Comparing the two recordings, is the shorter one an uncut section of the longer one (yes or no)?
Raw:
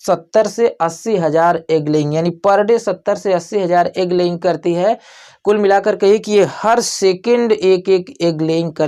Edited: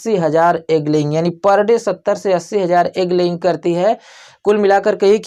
yes